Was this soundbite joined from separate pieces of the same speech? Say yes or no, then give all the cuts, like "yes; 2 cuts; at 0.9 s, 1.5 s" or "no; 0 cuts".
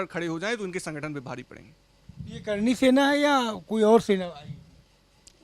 no; 0 cuts